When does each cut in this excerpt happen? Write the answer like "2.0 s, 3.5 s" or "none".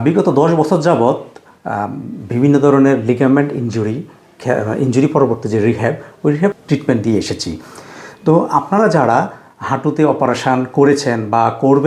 6.5 s